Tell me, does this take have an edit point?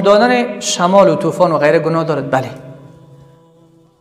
no; 0 cuts

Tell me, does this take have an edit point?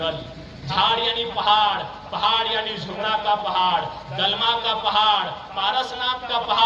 no; 0 cuts

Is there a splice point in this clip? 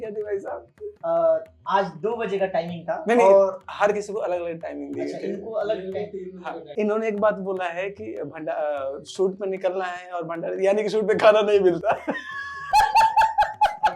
yes; 1 cut; at 6.7 s

